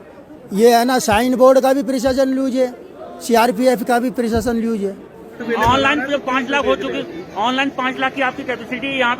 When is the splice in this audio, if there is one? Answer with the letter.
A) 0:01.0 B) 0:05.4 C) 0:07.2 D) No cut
B